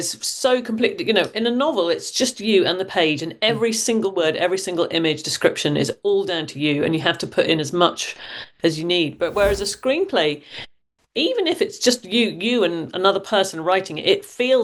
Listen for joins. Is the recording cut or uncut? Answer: uncut